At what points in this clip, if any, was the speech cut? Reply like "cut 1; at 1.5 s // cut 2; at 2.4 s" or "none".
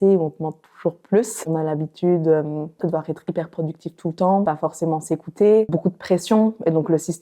cut 1; at 1.5 s // cut 2; at 4.5 s // cut 3; at 5.7 s

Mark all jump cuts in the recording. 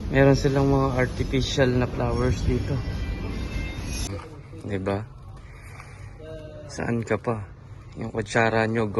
cut 1; at 4.1 s

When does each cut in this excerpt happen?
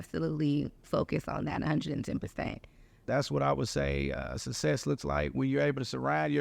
cut 1; at 2.9 s

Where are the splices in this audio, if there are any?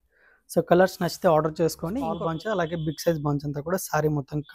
cut 1; at 2.1 s

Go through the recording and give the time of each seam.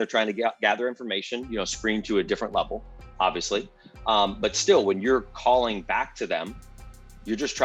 none

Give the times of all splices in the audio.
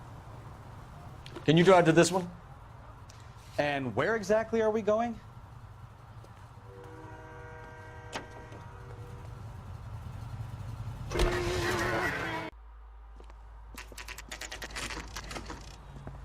cut 1; at 12.5 s

